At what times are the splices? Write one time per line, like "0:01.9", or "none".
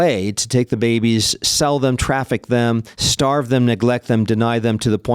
0:03.0